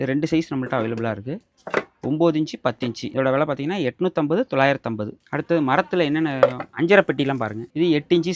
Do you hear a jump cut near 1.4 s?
no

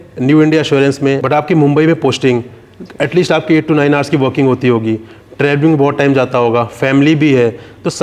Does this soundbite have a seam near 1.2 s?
yes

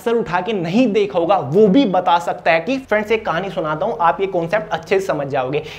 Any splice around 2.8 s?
yes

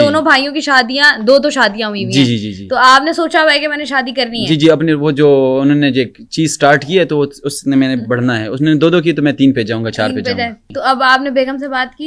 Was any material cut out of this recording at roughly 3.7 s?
no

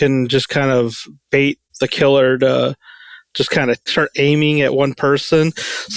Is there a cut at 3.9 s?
yes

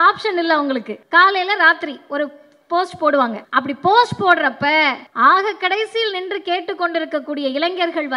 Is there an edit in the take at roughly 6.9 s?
no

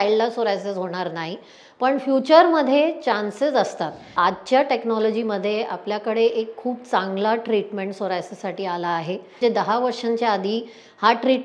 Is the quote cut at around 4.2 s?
yes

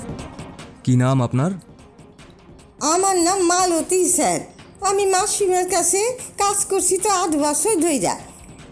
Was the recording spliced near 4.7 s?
no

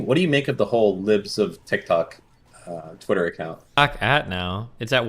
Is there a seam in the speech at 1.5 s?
no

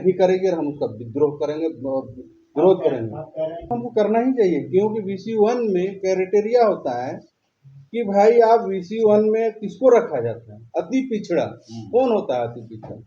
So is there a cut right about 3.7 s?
yes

